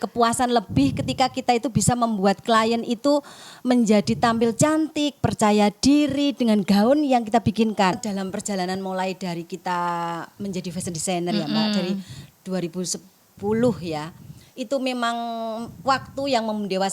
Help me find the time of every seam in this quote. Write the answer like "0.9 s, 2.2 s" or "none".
8.0 s